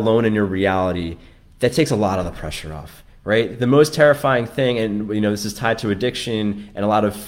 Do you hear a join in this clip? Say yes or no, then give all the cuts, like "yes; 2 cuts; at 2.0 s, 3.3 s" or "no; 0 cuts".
no; 0 cuts